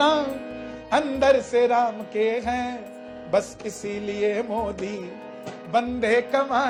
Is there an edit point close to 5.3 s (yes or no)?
no